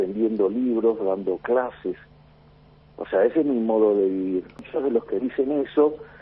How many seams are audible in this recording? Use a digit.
1